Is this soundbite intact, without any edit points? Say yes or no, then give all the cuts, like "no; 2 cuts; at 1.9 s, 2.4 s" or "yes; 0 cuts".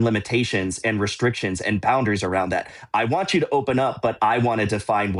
yes; 0 cuts